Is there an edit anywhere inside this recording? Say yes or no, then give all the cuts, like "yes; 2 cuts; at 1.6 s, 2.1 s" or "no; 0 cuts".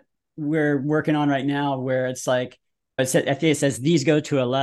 yes; 1 cut; at 3.0 s